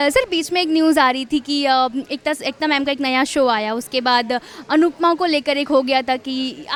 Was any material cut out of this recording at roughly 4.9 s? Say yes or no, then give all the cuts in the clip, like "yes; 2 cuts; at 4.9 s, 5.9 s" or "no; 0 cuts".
no; 0 cuts